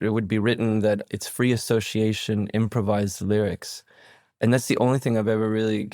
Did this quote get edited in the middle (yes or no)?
yes